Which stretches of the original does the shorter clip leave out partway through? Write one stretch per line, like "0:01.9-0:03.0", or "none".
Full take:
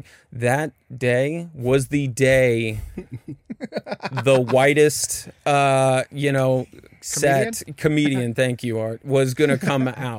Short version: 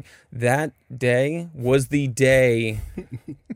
none